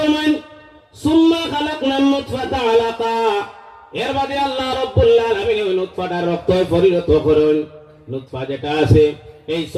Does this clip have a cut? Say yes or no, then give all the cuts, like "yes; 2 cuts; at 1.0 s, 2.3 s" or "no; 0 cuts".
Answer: no; 0 cuts